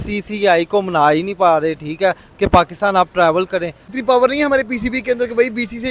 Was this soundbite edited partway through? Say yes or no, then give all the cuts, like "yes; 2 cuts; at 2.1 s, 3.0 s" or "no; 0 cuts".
no; 0 cuts